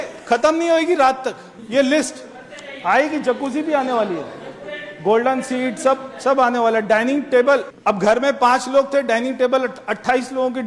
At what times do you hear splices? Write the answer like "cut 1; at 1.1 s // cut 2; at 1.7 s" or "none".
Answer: cut 1; at 1.5 s // cut 2; at 7.7 s